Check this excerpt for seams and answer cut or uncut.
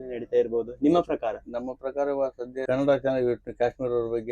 cut